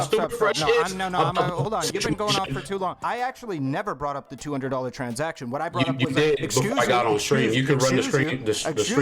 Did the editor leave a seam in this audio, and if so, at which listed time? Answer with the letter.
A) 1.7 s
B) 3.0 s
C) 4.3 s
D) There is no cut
B